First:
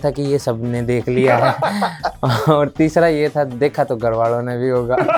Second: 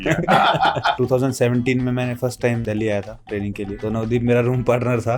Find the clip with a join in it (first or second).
second